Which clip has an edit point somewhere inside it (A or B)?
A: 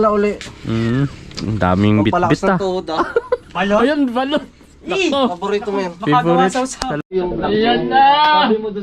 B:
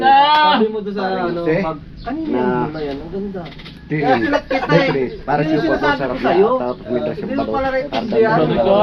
A